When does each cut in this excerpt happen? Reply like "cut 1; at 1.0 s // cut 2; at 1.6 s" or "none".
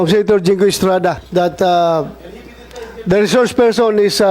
cut 1; at 1.2 s